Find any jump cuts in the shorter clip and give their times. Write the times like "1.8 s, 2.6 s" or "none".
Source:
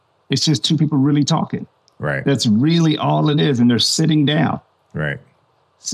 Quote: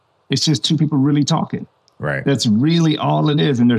none

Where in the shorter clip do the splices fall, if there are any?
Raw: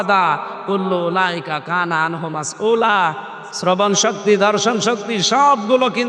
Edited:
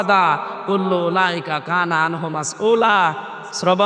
none

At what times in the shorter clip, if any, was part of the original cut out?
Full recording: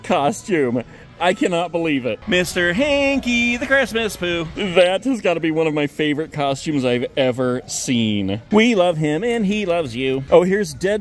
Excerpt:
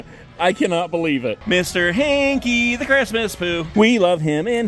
3.7 s

